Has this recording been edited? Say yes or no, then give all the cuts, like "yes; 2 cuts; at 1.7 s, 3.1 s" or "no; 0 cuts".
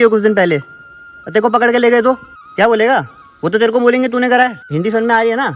yes; 2 cuts; at 2.4 s, 4.6 s